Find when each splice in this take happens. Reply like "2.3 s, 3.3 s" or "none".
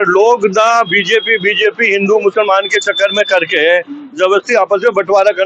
none